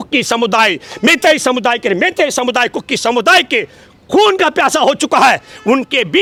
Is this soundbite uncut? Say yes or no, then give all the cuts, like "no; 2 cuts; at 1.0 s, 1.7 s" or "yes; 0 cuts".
yes; 0 cuts